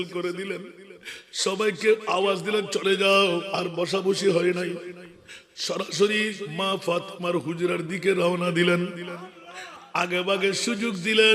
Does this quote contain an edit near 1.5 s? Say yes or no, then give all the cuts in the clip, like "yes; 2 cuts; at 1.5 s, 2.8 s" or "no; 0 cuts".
no; 2 cuts; at 3.5 s, 6.5 s